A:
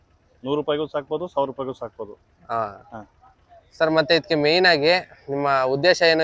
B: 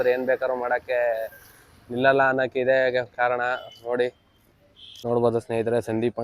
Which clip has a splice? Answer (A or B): B